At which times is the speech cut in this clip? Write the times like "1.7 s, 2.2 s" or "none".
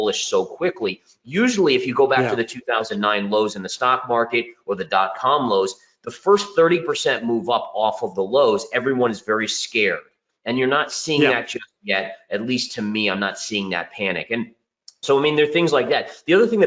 none

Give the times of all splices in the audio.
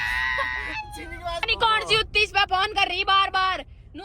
1.5 s

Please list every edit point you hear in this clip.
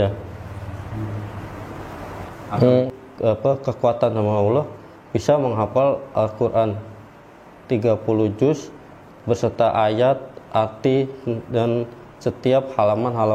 2.9 s

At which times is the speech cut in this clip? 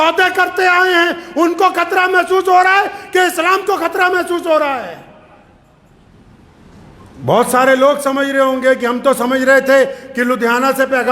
none

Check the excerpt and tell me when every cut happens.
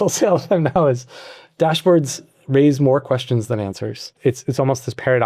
4.1 s

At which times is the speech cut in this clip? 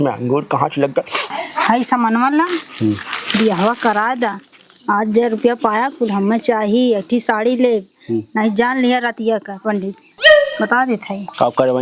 1.4 s

